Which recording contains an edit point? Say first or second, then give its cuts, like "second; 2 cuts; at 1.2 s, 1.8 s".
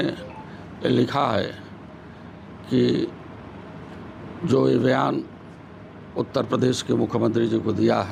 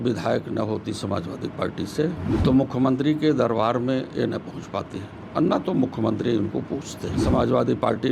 second; 2 cuts; at 2.3 s, 7.2 s